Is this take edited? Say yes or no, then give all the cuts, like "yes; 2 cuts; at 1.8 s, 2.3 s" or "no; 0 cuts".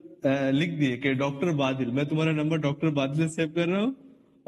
no; 0 cuts